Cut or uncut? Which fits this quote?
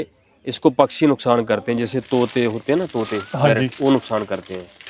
uncut